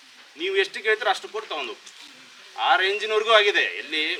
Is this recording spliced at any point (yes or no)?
no